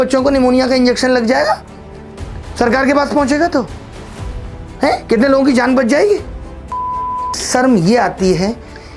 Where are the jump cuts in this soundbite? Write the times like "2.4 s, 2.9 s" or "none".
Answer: none